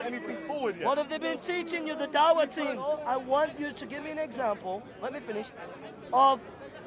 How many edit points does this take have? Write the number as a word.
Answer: one